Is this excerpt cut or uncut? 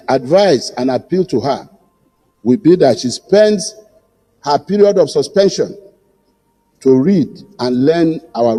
uncut